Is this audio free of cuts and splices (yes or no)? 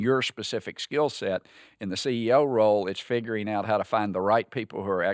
yes